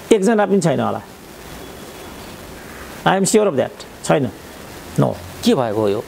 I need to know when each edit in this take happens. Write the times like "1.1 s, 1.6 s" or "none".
none